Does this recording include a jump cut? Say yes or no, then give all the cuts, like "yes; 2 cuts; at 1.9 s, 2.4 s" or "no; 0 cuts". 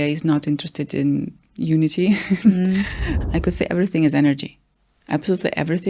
yes; 1 cut; at 3.1 s